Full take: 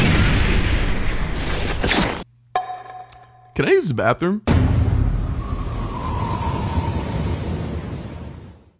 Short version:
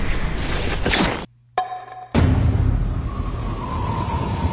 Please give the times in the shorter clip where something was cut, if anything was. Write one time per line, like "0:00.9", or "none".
0:02.1